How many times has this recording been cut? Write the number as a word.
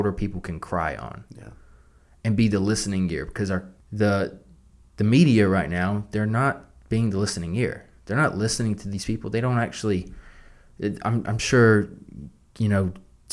one